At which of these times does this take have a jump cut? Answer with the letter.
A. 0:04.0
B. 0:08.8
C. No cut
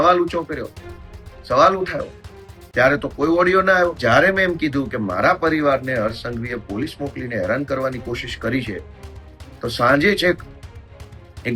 A